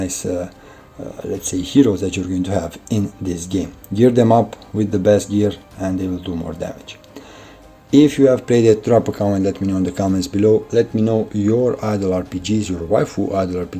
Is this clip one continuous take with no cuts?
yes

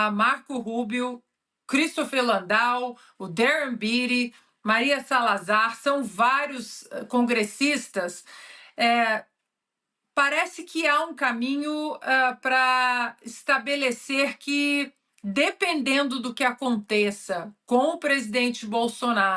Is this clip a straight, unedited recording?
yes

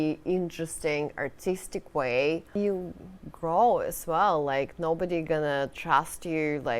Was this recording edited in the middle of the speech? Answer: yes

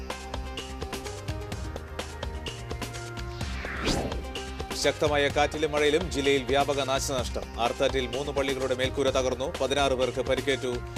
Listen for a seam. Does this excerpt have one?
no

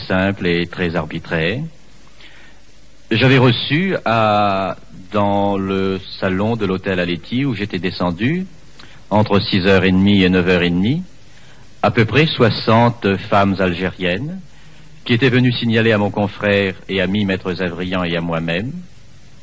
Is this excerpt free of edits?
no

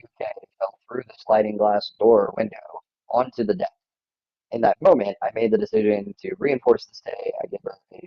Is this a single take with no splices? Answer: no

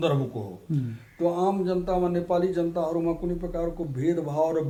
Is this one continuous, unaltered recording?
yes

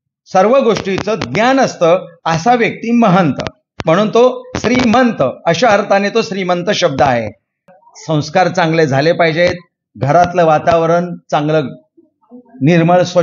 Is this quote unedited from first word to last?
no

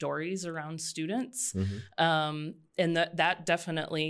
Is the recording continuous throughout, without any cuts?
yes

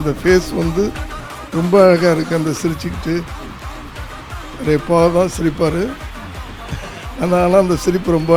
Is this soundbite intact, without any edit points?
yes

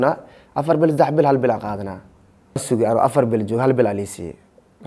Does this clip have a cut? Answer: yes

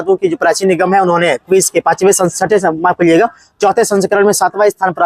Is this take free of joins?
yes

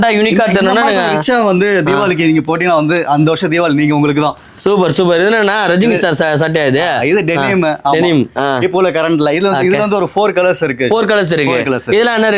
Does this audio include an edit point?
no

